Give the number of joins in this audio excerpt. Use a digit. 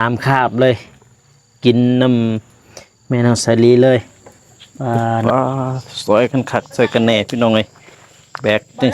1